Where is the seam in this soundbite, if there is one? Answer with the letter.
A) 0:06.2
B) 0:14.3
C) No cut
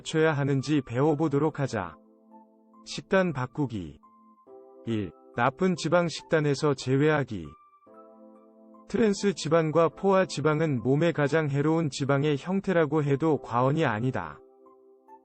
B